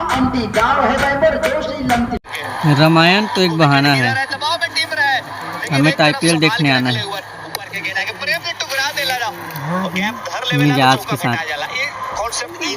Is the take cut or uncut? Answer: cut